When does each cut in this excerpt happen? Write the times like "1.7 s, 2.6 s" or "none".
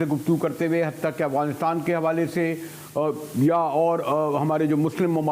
none

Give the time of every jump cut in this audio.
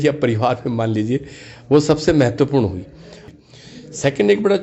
3.2 s

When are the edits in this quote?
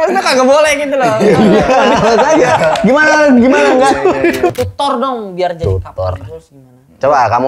4.5 s

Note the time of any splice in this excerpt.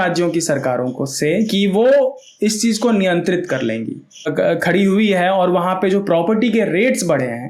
4.3 s

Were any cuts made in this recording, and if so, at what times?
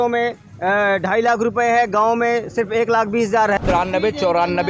3.6 s

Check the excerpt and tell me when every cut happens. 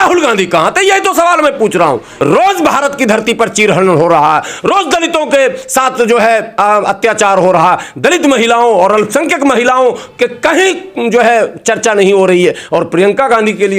2.1 s

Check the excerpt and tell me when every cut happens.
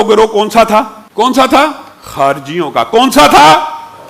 1.0 s

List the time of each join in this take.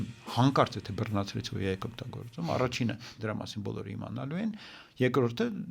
3.1 s

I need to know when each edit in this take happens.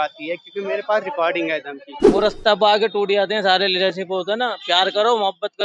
1.9 s

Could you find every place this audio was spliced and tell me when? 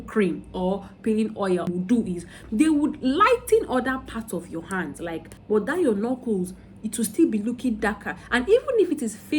1.7 s, 5.3 s

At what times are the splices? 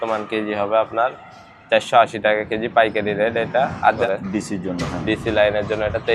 4.0 s

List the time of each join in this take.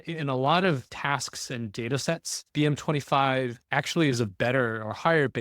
0.9 s, 2.4 s, 3.6 s

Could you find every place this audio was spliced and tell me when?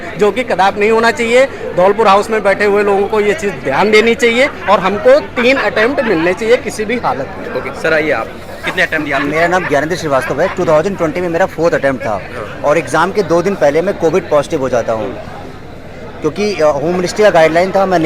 none

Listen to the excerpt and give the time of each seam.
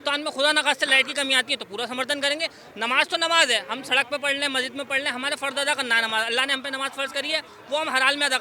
none

